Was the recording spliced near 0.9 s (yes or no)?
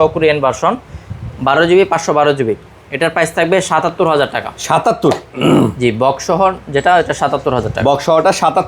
no